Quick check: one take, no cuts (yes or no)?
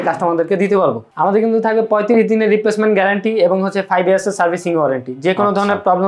no